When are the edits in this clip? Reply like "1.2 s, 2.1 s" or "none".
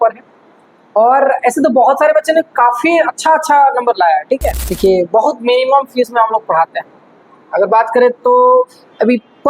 4.6 s